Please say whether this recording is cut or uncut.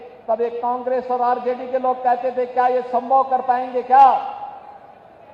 uncut